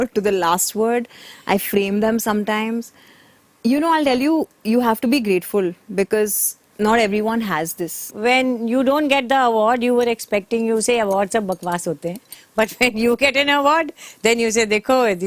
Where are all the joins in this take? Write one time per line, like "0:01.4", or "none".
0:08.0